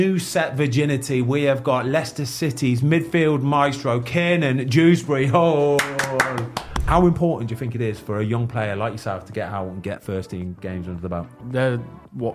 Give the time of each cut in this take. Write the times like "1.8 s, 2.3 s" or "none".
6.8 s, 11.4 s